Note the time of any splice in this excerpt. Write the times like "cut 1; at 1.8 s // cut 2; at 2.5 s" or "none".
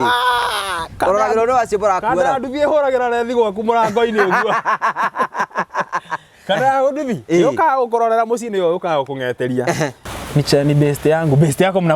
cut 1; at 10.0 s